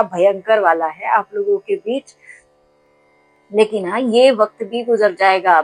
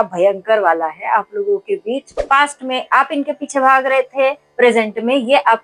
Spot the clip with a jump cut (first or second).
second